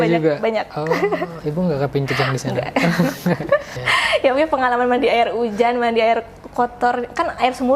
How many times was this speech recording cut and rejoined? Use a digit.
1